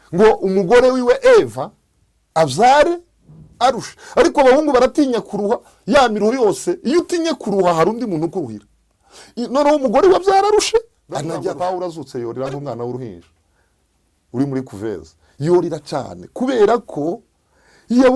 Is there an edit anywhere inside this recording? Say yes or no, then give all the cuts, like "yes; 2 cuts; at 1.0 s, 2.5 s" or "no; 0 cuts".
yes; 1 cut; at 11.5 s